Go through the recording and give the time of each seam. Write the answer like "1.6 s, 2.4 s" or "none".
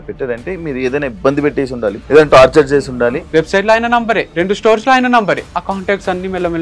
2.0 s, 3.2 s, 4.3 s, 5.5 s